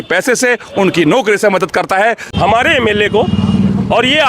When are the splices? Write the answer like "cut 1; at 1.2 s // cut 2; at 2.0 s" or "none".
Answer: cut 1; at 2.3 s